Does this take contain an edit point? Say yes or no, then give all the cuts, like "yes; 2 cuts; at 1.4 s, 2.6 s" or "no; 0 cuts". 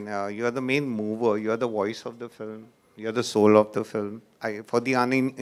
no; 0 cuts